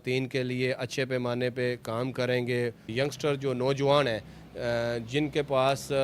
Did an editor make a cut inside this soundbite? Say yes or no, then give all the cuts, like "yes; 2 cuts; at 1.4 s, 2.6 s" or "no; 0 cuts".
yes; 1 cut; at 2.9 s